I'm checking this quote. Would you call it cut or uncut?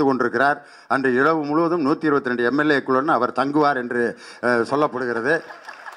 uncut